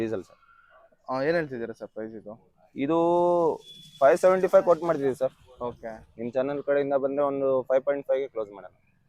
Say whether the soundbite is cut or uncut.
uncut